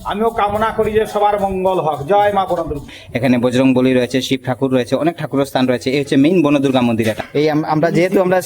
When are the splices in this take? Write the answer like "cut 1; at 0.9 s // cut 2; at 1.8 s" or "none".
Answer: cut 1; at 3.0 s // cut 2; at 7.2 s